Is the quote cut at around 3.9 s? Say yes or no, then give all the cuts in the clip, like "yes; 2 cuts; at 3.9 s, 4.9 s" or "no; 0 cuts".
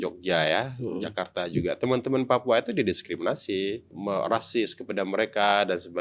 yes; 1 cut; at 3.9 s